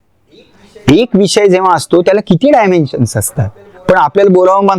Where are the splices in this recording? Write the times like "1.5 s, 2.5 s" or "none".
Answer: none